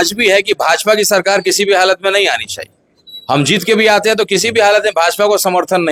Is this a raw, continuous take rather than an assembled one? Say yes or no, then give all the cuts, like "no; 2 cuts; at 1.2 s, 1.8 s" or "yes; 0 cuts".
yes; 0 cuts